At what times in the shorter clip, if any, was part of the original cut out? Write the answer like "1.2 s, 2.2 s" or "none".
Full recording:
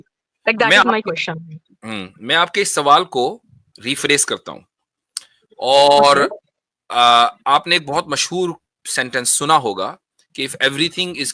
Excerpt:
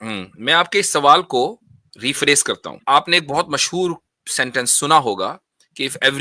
2.8 s

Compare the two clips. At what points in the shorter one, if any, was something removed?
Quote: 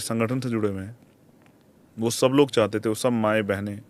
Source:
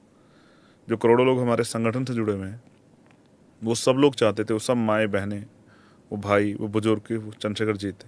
none

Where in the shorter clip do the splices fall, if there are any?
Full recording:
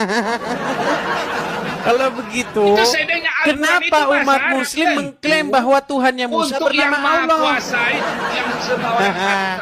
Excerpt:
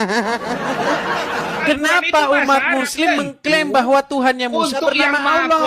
1.6 s

